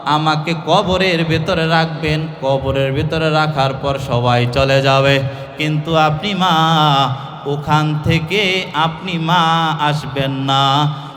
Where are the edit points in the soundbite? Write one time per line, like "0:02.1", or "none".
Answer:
none